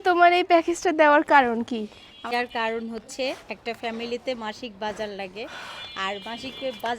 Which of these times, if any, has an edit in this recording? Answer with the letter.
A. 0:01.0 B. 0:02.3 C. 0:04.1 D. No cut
B